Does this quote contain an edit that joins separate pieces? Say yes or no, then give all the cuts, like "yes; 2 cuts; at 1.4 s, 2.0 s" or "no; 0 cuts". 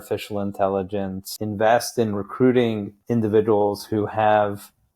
yes; 2 cuts; at 1.3 s, 3.0 s